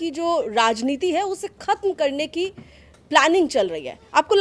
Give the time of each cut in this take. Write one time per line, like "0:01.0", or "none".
none